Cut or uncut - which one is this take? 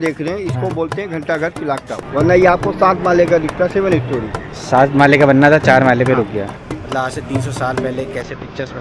cut